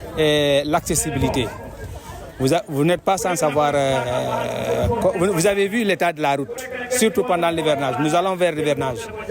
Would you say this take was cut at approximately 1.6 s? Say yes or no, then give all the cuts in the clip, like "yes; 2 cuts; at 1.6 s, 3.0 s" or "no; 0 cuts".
no; 0 cuts